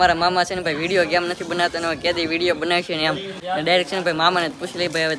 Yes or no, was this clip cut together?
yes